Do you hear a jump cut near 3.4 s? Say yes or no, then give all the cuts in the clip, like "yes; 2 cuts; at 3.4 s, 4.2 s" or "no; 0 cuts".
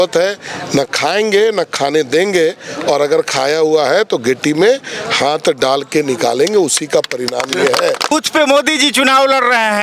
no; 1 cut; at 8.0 s